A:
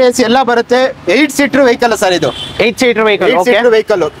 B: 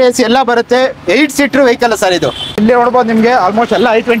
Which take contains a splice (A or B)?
B